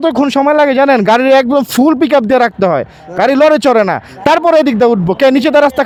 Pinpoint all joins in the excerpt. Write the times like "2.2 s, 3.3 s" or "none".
none

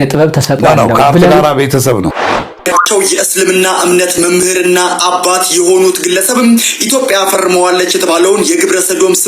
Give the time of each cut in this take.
2.2 s

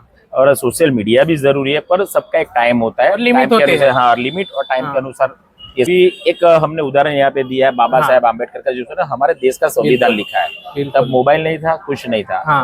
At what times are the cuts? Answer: 5.9 s

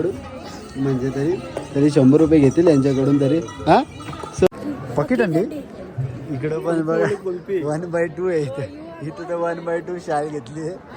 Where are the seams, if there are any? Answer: 4.5 s

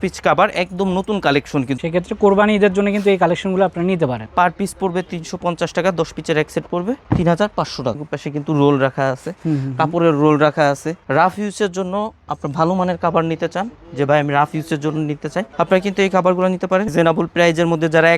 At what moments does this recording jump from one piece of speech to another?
1.8 s, 4.2 s, 8.1 s, 10.9 s, 16.9 s

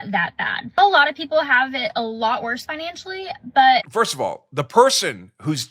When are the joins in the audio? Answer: 3.9 s

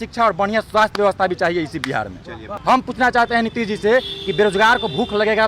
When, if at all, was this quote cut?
2.5 s

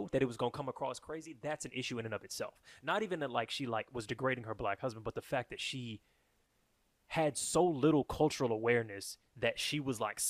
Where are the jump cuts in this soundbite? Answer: none

